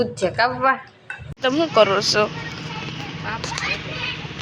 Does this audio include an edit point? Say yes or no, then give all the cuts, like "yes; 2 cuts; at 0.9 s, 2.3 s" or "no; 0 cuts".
yes; 1 cut; at 1.2 s